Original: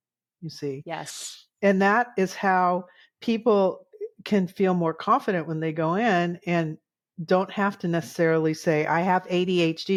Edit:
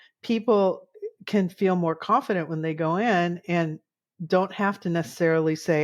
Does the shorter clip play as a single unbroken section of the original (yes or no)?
yes